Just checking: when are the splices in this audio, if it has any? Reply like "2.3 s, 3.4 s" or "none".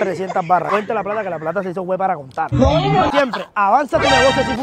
3.1 s